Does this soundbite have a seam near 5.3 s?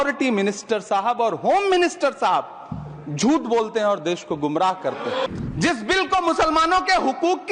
yes; 1 cut; at 5.3 s

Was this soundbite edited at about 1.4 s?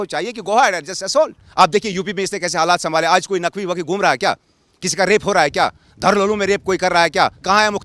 yes; 1 cut; at 1.4 s

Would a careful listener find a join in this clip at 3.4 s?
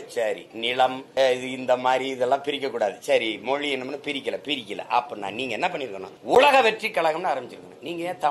no; 2 cuts; at 1.0 s, 6.1 s

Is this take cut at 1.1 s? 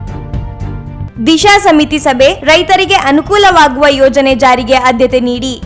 yes; 1 cut; at 1.1 s

